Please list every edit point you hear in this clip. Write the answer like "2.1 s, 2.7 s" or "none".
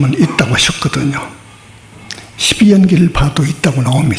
none